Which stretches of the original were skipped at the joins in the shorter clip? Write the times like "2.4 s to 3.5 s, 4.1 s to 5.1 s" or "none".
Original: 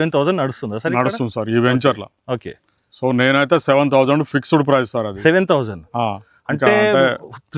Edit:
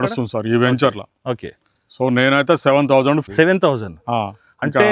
4.3 s to 5.1 s